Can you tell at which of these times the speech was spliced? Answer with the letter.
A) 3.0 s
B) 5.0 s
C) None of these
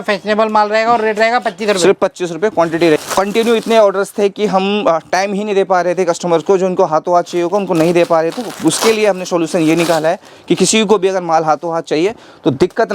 A